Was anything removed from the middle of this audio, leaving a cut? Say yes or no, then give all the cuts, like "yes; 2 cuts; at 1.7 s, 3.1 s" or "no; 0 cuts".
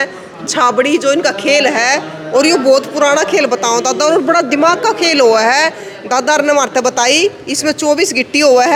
no; 0 cuts